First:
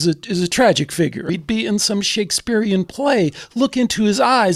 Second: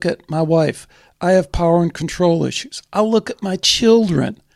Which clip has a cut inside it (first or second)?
first